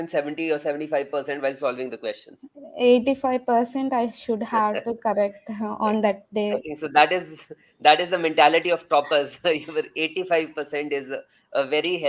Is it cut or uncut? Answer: uncut